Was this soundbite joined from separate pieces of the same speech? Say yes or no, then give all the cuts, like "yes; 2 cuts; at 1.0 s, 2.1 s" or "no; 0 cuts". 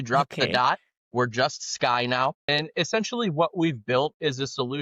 yes; 1 cut; at 2.5 s